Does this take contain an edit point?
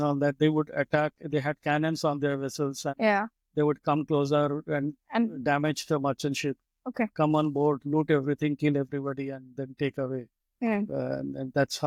no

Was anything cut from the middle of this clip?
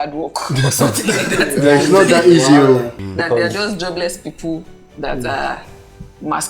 yes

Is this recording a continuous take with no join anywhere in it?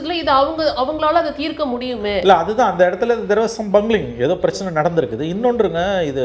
yes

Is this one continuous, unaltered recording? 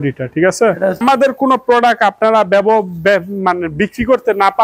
no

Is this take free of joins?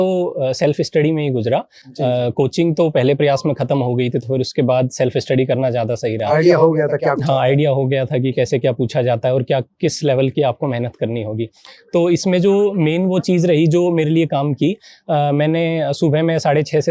yes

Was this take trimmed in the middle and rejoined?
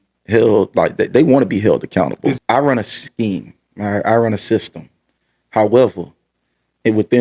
yes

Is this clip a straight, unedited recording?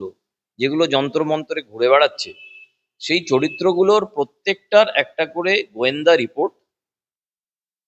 yes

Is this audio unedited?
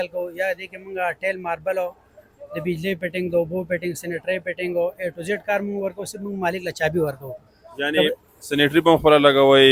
yes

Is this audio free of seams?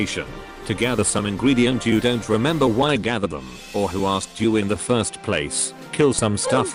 yes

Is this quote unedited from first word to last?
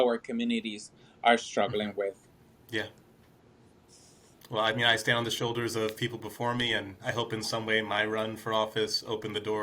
no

